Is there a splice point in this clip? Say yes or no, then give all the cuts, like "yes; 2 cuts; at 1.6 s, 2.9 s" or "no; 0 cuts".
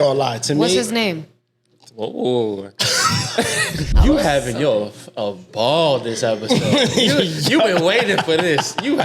yes; 1 cut; at 3.9 s